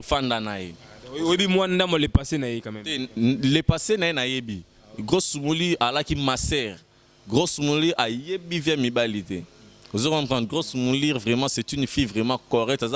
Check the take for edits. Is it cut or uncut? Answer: uncut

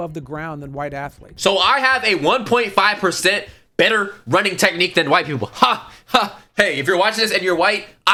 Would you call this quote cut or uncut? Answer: uncut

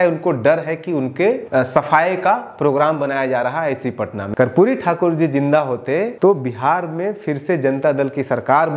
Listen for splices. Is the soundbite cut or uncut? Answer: cut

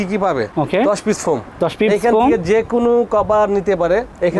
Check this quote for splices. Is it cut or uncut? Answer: uncut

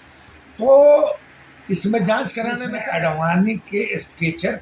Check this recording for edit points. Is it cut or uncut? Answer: cut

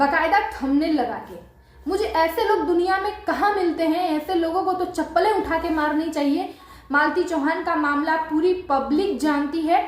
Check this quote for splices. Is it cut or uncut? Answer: cut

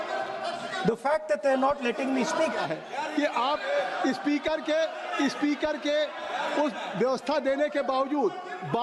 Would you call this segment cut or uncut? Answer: cut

